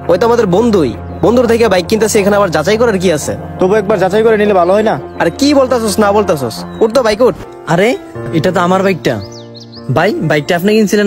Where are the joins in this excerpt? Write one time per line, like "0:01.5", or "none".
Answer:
0:07.4